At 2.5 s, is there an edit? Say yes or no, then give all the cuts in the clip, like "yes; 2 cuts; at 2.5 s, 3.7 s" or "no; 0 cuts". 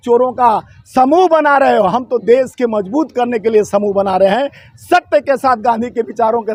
no; 0 cuts